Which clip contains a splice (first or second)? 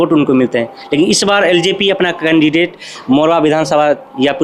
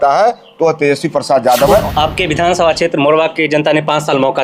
second